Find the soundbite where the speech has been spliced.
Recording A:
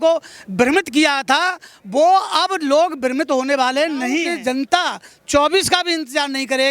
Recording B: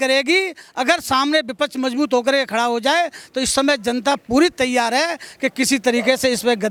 A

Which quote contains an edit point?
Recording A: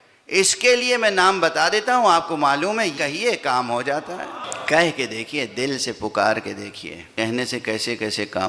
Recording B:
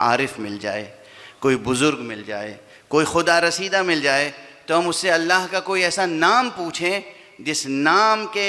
A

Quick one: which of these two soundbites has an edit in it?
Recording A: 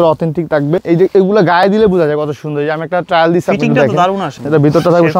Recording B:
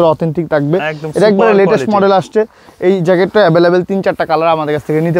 A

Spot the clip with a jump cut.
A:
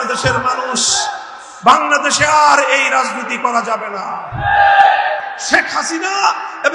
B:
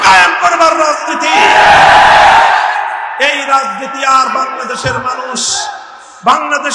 A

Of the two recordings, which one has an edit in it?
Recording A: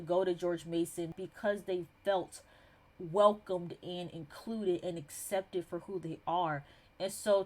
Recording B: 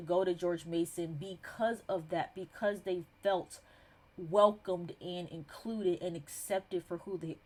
A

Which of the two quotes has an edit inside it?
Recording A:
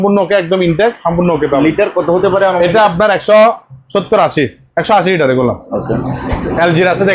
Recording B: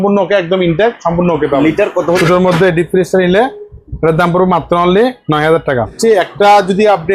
B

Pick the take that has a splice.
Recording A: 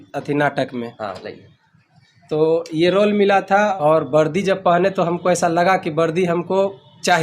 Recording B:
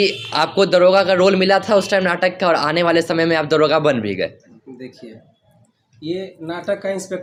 A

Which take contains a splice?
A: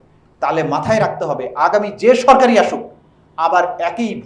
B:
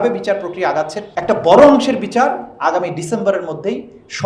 B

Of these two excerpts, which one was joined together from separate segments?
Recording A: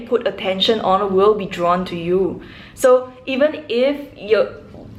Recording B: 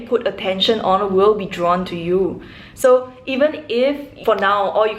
B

